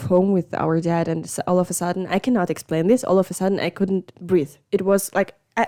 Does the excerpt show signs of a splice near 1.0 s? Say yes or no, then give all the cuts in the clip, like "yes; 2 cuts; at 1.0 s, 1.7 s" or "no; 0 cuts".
no; 0 cuts